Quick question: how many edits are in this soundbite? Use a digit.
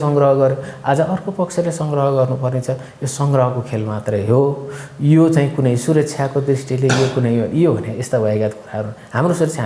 0